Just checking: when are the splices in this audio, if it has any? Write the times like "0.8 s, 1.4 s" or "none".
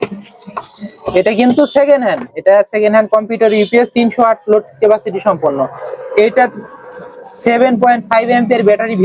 none